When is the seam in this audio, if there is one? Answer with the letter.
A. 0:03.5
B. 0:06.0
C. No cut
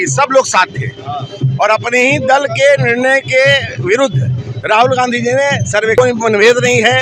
B